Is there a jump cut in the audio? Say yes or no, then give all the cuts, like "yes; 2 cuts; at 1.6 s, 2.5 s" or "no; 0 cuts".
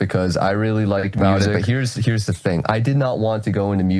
yes; 1 cut; at 1.5 s